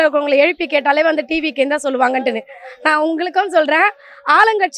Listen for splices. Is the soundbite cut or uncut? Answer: uncut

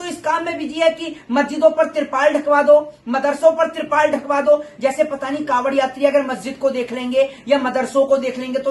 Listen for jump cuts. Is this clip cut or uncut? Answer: uncut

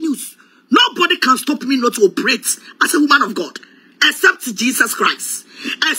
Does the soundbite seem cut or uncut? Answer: uncut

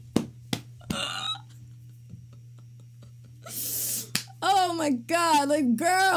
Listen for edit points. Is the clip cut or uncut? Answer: uncut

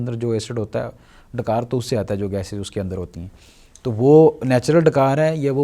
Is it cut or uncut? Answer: uncut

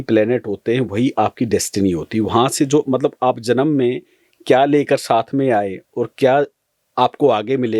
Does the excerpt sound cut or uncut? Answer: uncut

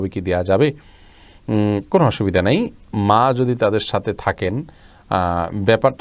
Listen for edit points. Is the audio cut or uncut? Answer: uncut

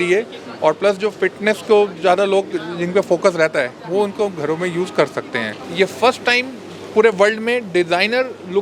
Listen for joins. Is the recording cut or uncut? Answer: cut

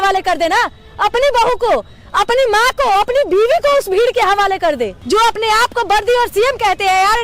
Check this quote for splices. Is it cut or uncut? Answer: cut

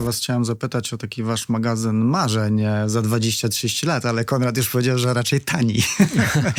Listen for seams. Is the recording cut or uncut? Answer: uncut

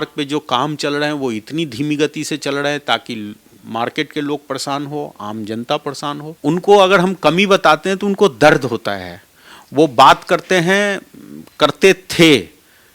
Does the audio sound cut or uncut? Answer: cut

